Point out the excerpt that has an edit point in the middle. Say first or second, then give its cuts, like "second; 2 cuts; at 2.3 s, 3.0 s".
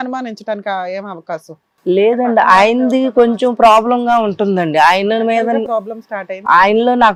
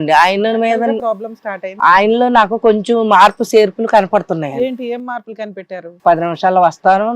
second; 1 cut; at 5.9 s